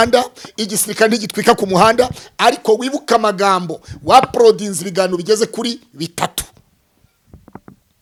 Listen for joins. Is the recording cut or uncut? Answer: uncut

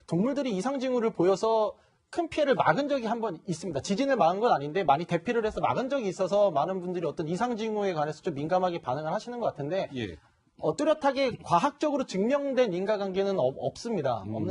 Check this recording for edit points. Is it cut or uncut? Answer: cut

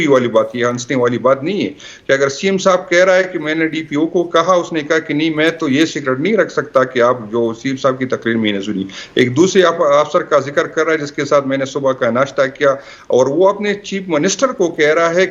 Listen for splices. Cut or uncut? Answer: uncut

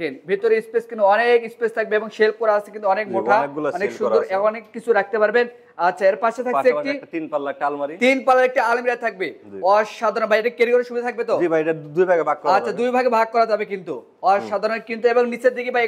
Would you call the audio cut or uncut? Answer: uncut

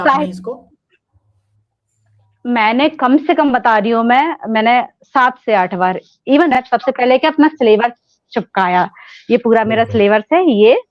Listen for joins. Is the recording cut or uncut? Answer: cut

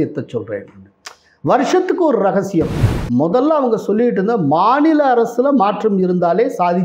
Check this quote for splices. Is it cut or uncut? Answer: cut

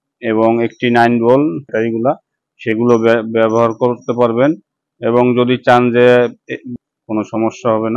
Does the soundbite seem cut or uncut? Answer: cut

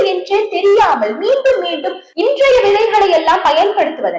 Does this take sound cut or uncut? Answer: cut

